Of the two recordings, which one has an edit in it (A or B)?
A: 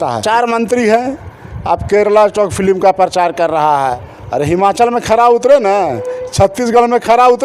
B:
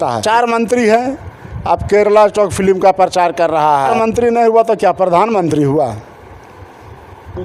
A